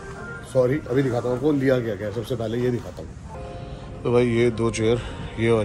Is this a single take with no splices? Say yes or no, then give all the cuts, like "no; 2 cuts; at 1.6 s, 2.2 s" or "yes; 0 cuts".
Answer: yes; 0 cuts